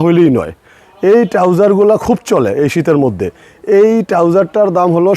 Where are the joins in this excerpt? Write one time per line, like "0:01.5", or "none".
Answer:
none